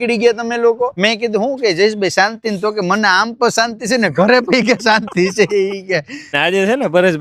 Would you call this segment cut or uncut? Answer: cut